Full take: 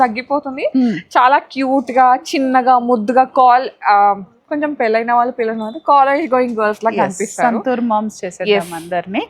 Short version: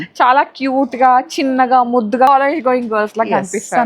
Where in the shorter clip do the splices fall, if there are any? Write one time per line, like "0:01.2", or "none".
0:02.3